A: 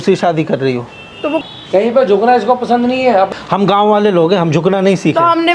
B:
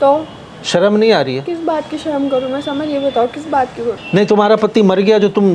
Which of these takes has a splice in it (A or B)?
A